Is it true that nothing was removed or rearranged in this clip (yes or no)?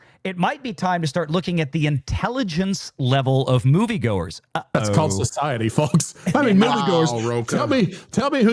yes